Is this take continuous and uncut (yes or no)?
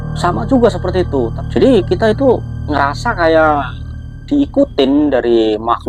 yes